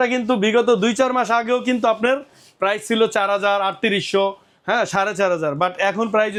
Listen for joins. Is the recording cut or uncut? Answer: uncut